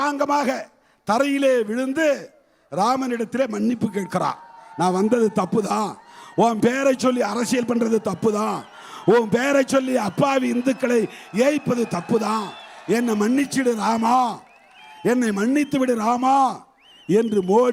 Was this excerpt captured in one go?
yes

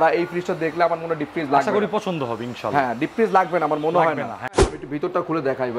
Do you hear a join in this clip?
yes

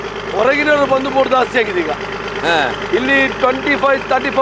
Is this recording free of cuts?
yes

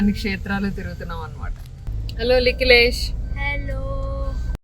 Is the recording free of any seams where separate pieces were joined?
no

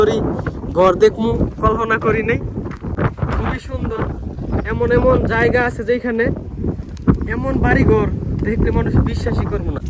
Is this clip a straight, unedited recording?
yes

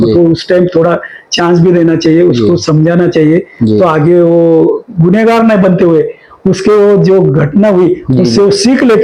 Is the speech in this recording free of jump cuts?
yes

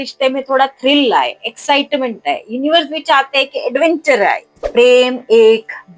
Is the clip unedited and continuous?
no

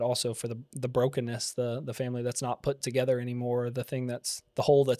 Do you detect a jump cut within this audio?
no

